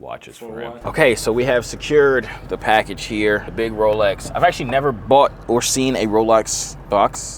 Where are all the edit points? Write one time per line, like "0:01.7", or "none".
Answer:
0:00.8
0:03.5